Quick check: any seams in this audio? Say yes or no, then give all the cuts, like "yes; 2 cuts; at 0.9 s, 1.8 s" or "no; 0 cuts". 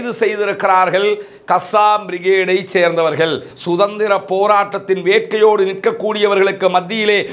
yes; 1 cut; at 3.5 s